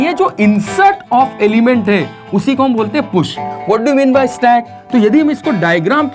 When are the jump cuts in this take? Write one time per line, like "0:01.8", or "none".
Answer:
0:03.5